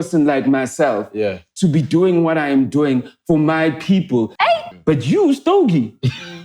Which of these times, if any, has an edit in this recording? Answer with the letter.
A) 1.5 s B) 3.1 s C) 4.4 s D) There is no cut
C